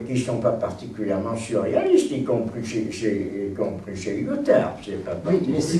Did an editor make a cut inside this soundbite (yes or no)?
no